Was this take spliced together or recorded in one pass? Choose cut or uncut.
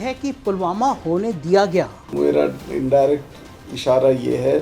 cut